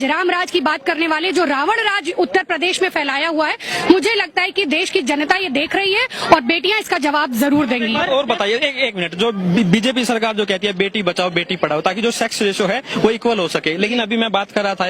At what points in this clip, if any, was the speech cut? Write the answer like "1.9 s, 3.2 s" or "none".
none